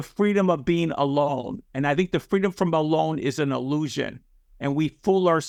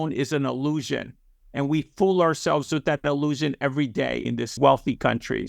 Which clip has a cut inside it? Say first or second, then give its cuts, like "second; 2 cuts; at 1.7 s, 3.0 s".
second; 1 cut; at 4.5 s